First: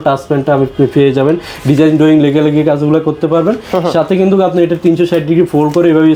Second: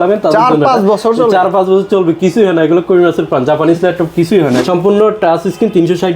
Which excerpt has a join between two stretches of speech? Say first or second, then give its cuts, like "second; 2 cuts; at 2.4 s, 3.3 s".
second; 1 cut; at 4.6 s